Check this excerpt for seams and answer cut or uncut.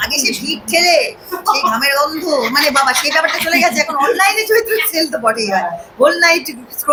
uncut